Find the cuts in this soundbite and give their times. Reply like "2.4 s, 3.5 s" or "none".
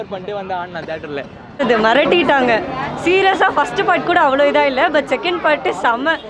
1.4 s